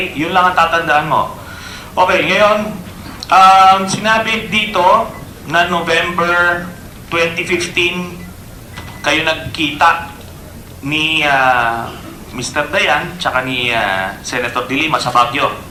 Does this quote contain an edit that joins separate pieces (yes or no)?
no